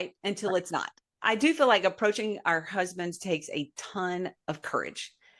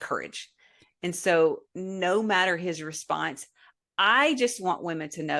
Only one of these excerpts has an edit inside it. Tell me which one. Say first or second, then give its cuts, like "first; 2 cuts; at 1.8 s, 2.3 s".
first; 1 cut; at 1.1 s